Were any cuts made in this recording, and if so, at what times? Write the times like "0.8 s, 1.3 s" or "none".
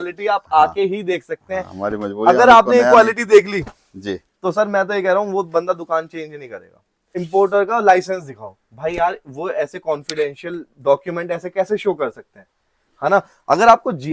7.2 s